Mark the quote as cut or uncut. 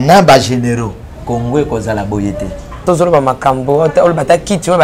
cut